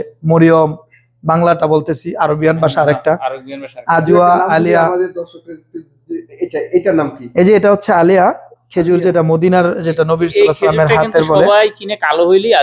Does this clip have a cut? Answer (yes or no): yes